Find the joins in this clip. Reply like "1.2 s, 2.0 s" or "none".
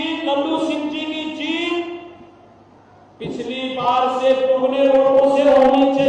none